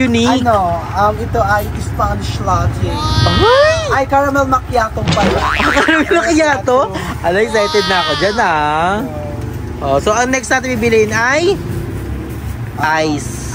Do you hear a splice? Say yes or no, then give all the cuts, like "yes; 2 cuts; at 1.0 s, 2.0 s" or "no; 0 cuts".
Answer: no; 0 cuts